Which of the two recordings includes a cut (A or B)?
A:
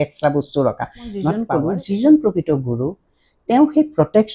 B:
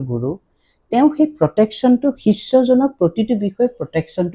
A